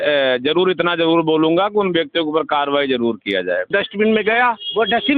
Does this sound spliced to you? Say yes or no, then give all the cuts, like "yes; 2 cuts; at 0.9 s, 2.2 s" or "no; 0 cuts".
yes; 1 cut; at 3.7 s